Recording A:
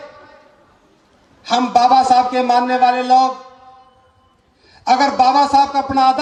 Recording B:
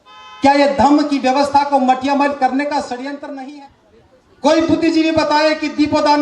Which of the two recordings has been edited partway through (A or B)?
B